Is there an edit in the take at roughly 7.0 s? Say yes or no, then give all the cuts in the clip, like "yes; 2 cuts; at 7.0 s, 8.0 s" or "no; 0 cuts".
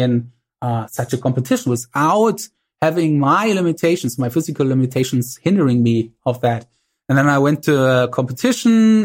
no; 0 cuts